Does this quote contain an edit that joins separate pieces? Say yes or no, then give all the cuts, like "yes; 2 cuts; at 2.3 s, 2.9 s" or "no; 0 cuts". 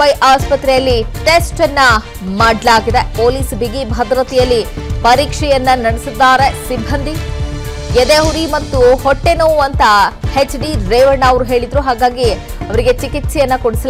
no; 0 cuts